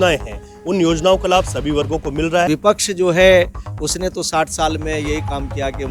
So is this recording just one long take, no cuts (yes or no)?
no